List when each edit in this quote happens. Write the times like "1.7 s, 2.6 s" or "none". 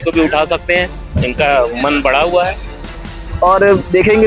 3.2 s